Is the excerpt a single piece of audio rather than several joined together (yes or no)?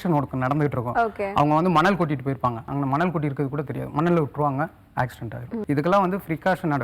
no